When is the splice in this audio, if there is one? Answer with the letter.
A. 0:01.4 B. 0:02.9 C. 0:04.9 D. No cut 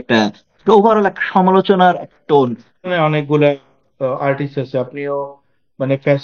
B